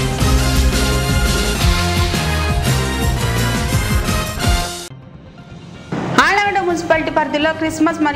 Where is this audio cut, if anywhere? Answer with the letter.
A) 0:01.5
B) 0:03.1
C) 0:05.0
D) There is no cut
C